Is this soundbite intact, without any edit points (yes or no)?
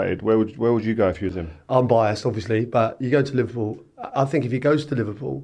yes